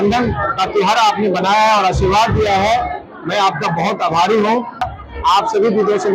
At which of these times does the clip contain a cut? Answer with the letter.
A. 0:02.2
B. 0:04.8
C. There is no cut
B